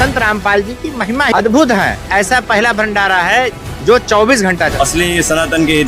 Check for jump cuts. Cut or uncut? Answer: cut